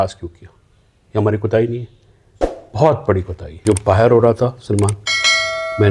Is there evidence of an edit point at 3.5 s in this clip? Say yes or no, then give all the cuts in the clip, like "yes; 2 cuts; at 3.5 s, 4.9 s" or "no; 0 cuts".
yes; 1 cut; at 3.5 s